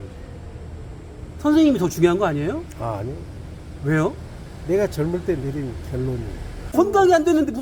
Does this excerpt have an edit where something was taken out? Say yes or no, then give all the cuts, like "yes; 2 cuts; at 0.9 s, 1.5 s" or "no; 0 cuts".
yes; 1 cut; at 6.7 s